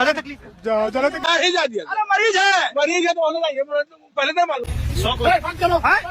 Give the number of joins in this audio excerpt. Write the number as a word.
two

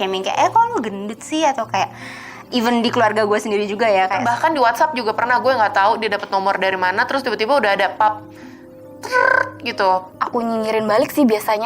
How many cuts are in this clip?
two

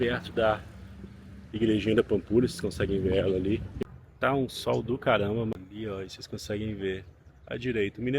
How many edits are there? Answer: two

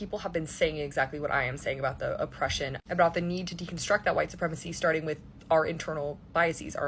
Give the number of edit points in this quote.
zero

